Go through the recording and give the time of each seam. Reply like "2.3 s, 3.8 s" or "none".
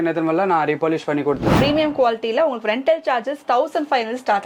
1.5 s